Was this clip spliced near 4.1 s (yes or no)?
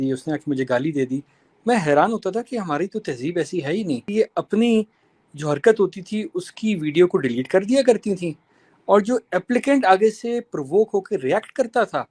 yes